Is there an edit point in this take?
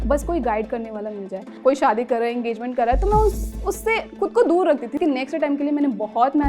yes; 2 cuts; at 1.5 s, 5.0 s

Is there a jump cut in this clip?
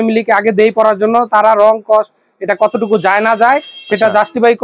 no; 0 cuts

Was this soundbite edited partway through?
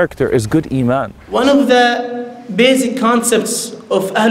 yes; 1 cut; at 1.2 s

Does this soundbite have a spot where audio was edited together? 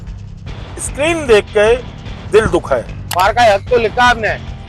yes; 1 cut; at 3.0 s

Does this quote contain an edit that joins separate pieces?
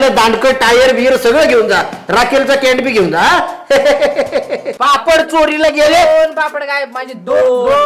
yes; 1 cut; at 4.7 s

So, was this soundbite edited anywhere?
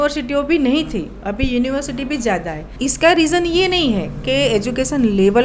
yes; 1 cut; at 2.7 s

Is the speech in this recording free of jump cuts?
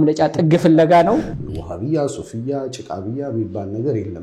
no; 1 cut; at 1.3 s

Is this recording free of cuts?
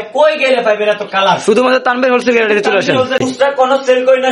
no; 1 cut; at 3.2 s

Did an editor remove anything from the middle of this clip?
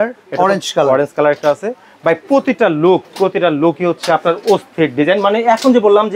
no; 0 cuts

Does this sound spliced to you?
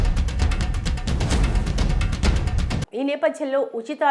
yes; 1 cut; at 2.8 s

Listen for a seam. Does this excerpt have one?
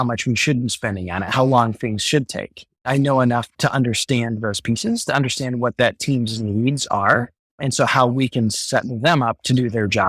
no; 0 cuts

